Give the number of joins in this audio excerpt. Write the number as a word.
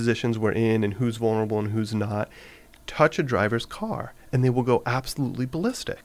zero